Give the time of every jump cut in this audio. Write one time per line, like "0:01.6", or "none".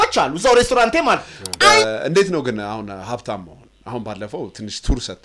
0:01.8